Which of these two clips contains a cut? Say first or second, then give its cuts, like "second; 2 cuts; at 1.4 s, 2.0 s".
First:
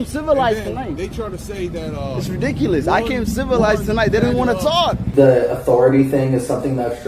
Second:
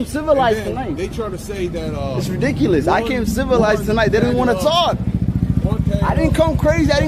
first; 1 cut; at 5.0 s